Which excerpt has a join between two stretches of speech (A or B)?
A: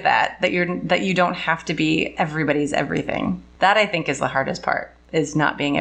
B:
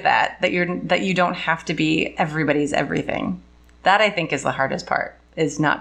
A